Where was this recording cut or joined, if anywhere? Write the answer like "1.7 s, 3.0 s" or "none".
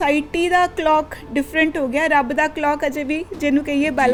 none